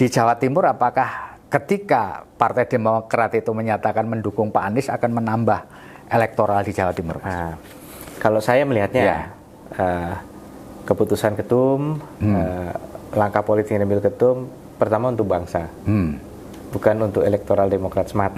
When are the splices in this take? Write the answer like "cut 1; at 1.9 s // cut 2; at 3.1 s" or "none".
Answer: none